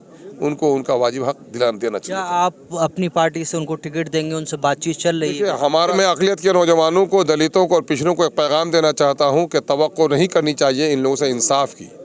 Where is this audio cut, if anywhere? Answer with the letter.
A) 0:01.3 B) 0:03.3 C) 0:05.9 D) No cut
C